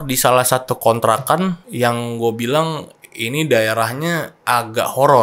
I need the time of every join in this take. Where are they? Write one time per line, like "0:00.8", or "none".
0:01.6
0:04.3